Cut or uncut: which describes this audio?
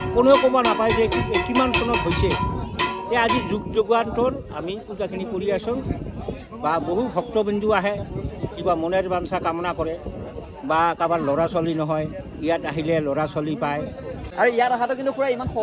cut